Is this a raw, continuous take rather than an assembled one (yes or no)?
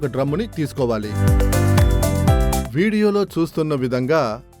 no